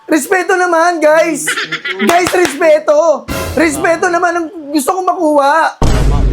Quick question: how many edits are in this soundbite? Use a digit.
0